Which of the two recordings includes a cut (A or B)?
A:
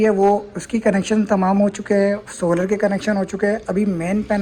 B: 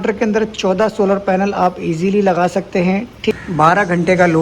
B